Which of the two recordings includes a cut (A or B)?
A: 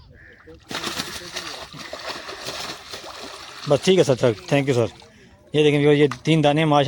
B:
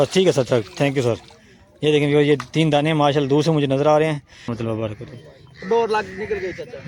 B